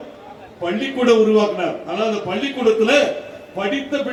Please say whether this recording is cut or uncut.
uncut